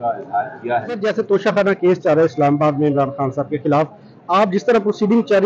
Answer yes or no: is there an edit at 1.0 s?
yes